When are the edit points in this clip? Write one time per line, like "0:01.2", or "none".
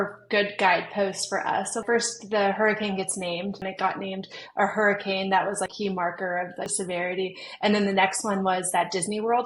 0:01.8
0:03.6
0:05.7
0:06.7